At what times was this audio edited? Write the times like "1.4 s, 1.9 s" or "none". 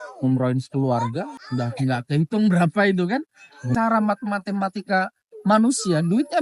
1.3 s, 3.7 s